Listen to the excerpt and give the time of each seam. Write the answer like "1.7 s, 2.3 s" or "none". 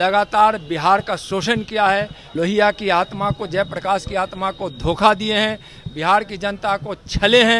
2.2 s